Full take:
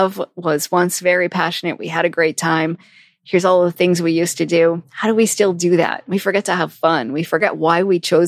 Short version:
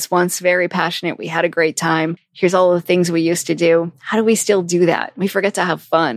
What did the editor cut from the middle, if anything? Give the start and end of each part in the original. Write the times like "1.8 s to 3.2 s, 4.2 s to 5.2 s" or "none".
2.8 s to 3.1 s